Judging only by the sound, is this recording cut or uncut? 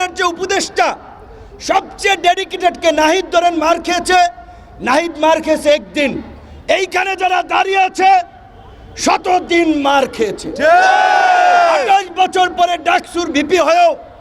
uncut